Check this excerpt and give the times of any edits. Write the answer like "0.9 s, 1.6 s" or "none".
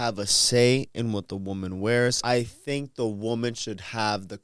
2.2 s